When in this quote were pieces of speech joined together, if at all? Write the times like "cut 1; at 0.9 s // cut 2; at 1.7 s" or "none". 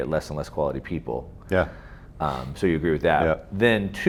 none